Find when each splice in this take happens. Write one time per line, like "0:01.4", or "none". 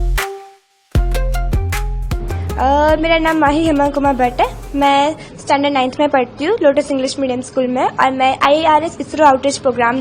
0:02.5

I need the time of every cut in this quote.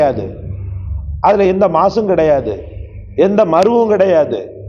none

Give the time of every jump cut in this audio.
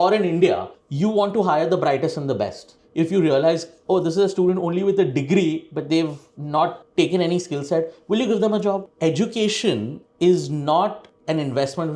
0:02.8
0:08.9

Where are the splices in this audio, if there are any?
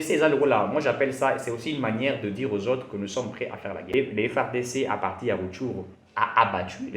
0:03.9

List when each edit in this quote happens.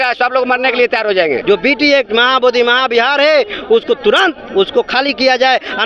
0:01.4

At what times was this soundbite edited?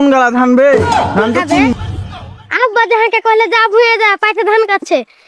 0:01.7

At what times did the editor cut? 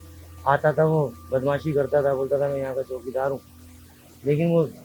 none

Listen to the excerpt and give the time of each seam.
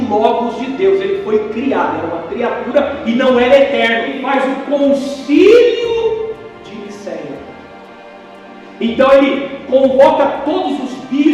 0:04.2

